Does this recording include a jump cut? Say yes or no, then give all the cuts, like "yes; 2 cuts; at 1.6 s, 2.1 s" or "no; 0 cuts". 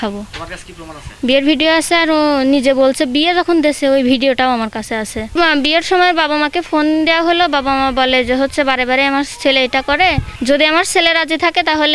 yes; 2 cuts; at 5.3 s, 10.3 s